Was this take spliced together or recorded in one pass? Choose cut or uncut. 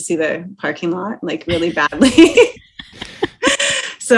uncut